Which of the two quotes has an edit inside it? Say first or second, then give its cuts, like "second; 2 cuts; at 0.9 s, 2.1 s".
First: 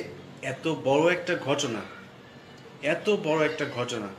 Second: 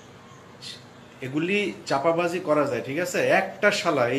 second; 1 cut; at 1.8 s